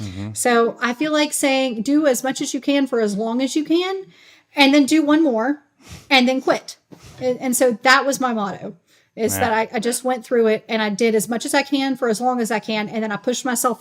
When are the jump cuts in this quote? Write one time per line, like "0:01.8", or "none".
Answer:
none